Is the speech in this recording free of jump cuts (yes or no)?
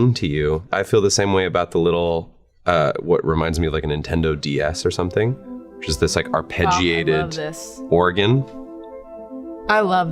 yes